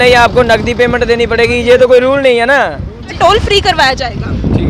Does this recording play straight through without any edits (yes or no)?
no